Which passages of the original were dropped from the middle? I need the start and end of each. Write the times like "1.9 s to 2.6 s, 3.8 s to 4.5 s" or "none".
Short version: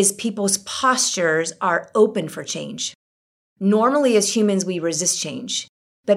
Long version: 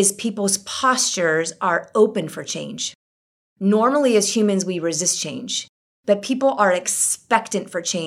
none